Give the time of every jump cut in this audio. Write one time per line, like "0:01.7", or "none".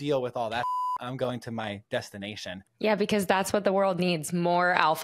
0:02.6